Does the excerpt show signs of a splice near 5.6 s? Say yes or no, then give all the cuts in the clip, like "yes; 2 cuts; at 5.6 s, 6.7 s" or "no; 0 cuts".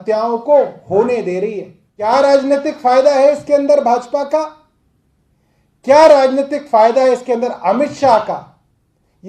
no; 1 cut; at 2.1 s